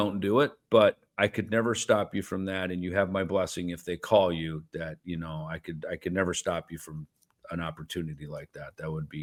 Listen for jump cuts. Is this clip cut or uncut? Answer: uncut